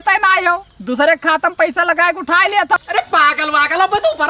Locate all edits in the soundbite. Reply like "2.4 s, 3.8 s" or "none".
2.8 s